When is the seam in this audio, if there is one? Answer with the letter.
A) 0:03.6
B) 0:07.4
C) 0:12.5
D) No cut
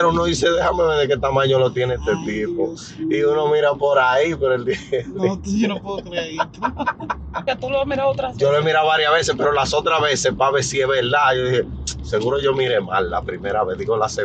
B